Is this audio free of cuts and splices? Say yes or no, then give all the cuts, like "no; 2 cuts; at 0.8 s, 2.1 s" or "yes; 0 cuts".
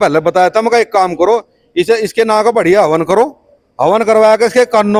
yes; 0 cuts